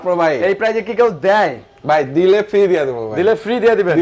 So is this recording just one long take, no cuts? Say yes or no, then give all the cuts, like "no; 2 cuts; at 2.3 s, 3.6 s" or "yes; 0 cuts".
yes; 0 cuts